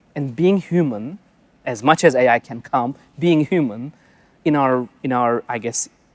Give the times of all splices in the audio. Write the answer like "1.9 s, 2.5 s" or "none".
none